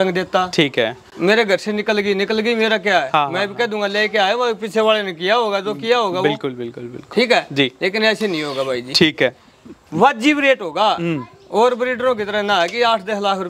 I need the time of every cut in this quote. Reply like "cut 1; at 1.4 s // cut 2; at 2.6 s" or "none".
none